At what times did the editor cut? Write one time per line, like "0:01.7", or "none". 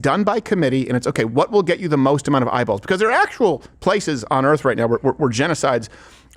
none

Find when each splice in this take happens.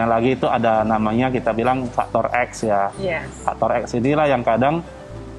none

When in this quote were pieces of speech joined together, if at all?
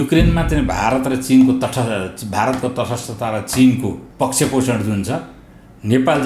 0:04.0

